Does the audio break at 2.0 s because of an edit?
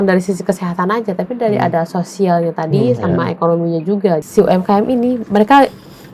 no; 1 cut; at 4.2 s

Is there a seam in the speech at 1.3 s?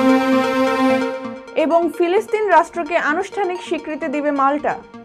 yes; 1 cut; at 1.3 s

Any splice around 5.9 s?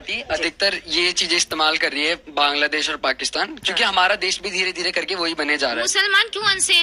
yes; 1 cut; at 5.9 s

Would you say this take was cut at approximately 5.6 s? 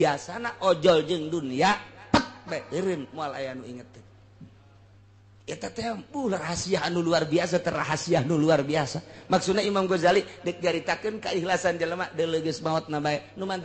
no; 0 cuts

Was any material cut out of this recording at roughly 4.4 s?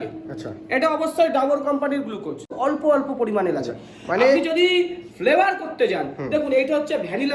no; 1 cut; at 2.5 s

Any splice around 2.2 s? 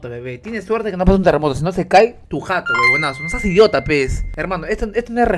yes; 2 cuts; at 2.2 s, 4.3 s

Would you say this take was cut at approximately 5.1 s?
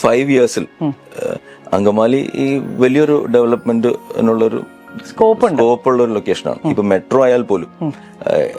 no; 0 cuts

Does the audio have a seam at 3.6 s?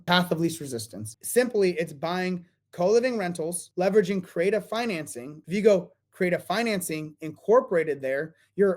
yes; 2 cuts; at 3.6 s, 5.3 s

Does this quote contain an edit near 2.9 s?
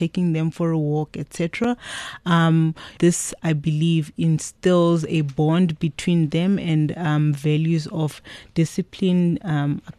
yes; 1 cut; at 2.9 s

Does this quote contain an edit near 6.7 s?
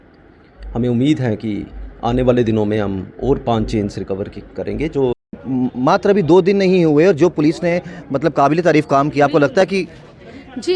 no; 1 cut; at 5.3 s

